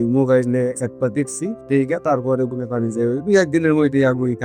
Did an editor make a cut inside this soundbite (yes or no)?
no